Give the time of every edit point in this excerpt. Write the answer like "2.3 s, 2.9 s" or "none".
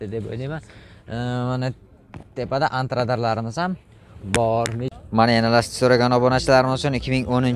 4.9 s